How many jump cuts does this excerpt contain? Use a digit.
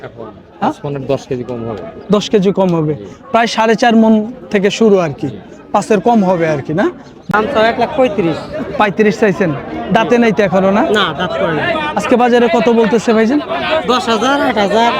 1